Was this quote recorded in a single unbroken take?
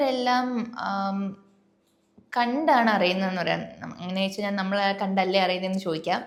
yes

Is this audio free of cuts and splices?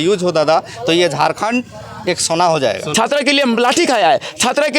no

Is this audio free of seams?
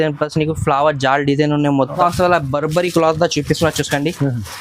no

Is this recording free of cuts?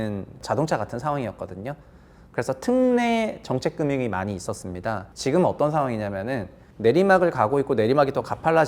no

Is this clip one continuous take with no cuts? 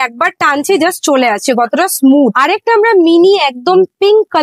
yes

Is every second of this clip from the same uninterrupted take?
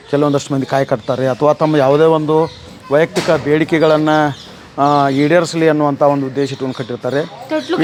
yes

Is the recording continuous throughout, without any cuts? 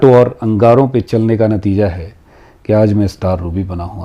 yes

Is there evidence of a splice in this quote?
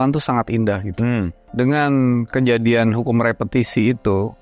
yes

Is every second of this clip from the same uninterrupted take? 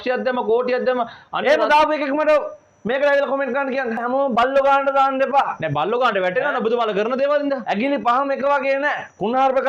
no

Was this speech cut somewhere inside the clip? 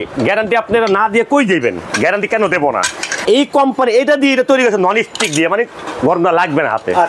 yes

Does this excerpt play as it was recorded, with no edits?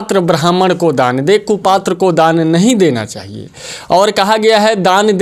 yes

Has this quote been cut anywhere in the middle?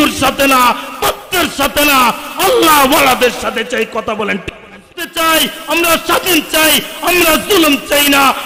no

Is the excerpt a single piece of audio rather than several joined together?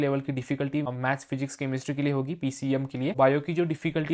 no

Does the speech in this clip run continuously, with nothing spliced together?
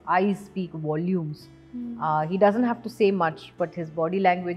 yes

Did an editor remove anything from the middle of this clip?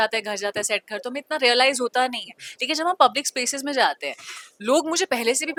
no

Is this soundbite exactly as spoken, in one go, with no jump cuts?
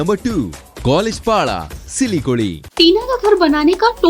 no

